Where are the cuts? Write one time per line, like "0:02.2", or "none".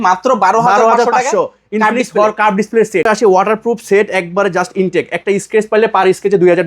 0:03.1